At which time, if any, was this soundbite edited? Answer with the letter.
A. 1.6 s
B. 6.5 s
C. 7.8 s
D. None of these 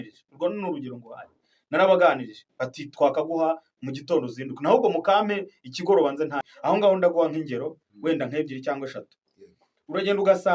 B